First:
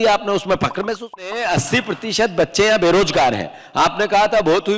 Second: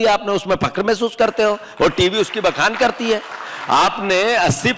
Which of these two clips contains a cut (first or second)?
first